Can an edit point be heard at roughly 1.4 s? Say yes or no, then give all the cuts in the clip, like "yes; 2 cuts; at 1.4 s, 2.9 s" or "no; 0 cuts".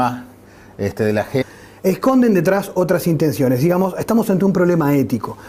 no; 0 cuts